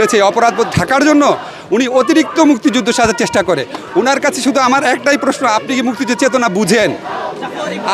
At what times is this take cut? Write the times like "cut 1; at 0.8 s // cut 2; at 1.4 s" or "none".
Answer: none